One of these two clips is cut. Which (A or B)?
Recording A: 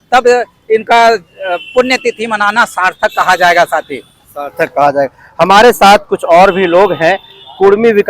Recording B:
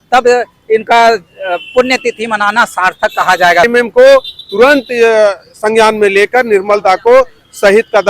B